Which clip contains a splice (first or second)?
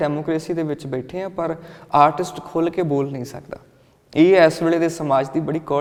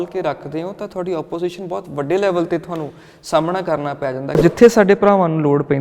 second